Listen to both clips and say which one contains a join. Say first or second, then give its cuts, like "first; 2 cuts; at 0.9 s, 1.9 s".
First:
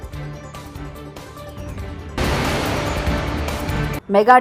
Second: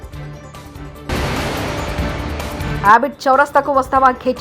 second; 2 cuts; at 1.1 s, 2.7 s